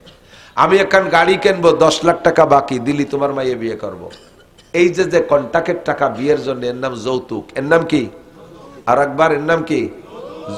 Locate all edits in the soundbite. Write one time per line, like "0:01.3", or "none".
none